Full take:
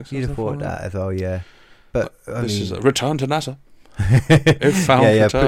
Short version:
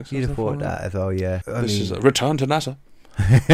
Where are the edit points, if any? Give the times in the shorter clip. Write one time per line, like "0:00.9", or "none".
0:01.4